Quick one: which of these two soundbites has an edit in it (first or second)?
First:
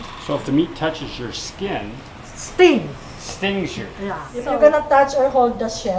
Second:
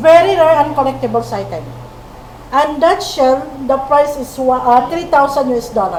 first